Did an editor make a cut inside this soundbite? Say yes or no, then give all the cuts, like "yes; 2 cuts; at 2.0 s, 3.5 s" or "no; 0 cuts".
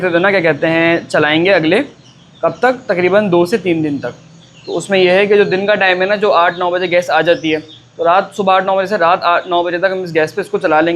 no; 0 cuts